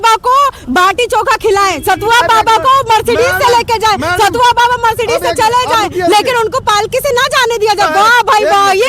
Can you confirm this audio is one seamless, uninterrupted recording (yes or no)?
yes